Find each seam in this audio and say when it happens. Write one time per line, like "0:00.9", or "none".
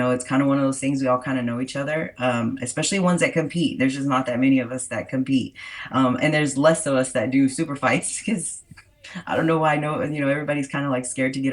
none